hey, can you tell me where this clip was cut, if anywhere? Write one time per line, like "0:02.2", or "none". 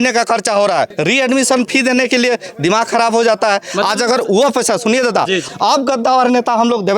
0:00.9
0:05.4